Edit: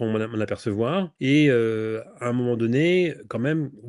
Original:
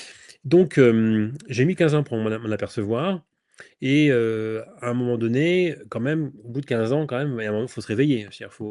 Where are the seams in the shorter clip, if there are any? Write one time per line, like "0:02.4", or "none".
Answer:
0:01.1